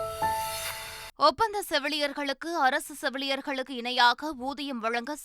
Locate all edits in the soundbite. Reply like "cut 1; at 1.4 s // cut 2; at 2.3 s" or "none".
cut 1; at 1.1 s